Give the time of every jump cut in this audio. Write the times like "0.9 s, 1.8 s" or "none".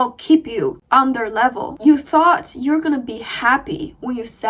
1.7 s